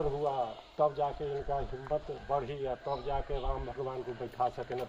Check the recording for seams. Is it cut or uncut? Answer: uncut